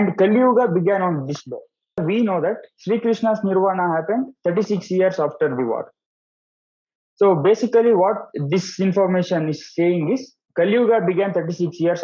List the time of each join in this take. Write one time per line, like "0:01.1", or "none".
0:02.0